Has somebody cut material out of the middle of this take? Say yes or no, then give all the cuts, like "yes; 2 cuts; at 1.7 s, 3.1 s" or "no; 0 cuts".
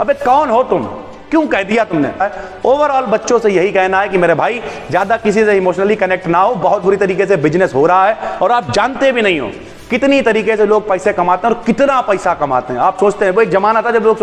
yes; 1 cut; at 2.3 s